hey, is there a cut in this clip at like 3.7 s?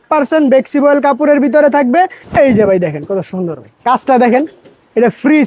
no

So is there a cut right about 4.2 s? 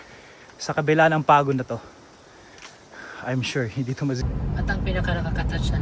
yes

